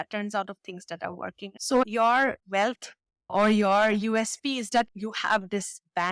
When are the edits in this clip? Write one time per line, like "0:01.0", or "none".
0:01.4